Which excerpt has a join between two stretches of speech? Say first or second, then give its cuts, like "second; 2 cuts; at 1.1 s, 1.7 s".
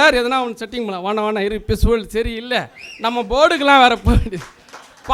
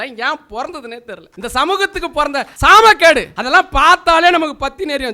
second; 3 cuts; at 1.2 s, 2.5 s, 3.3 s